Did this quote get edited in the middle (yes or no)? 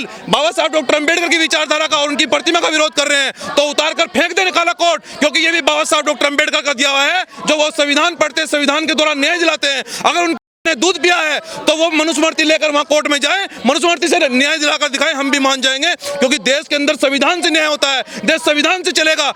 no